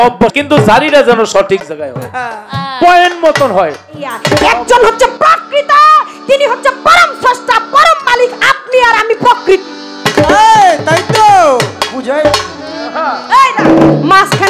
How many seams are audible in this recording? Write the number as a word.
two